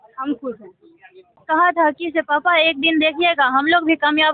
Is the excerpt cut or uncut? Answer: cut